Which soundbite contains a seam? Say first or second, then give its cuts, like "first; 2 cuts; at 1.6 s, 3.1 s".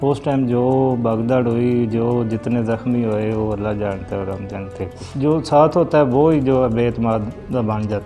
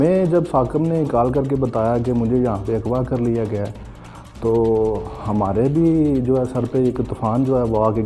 first; 1 cut; at 5.0 s